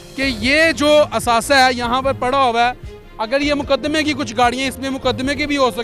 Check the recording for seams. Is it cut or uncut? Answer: uncut